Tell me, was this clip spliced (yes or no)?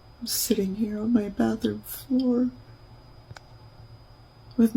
yes